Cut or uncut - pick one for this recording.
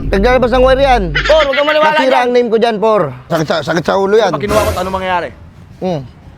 cut